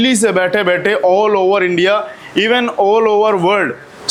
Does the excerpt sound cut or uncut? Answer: uncut